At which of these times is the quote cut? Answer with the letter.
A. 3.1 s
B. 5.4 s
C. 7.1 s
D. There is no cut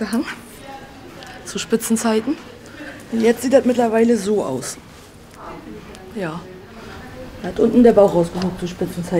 B